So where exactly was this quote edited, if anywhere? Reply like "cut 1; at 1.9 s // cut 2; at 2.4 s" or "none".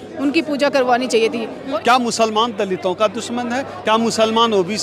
cut 1; at 1.7 s